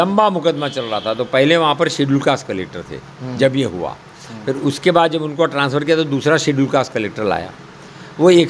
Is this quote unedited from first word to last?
yes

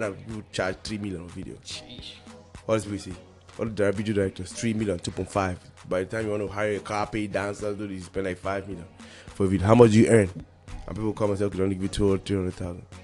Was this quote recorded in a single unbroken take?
yes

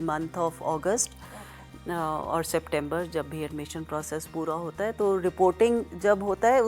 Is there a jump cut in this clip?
no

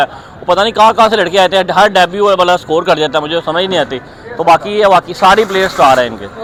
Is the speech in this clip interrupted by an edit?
no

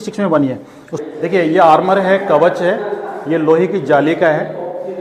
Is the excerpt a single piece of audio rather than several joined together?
no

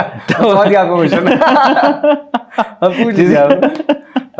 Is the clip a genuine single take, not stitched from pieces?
yes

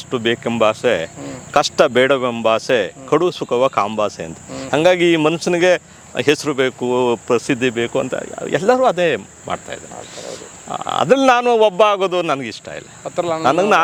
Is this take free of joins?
yes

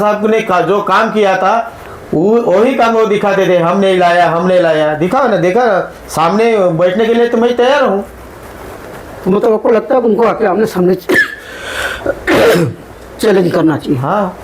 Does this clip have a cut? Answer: no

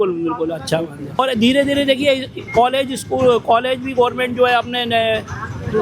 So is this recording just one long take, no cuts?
no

